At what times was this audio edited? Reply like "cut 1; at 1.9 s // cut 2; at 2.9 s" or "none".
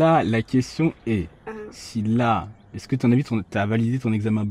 none